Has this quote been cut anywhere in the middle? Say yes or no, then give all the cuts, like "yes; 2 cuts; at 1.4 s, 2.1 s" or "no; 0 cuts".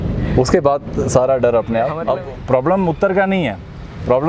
yes; 1 cut; at 2.0 s